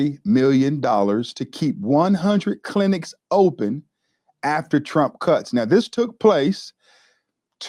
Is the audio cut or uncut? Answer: uncut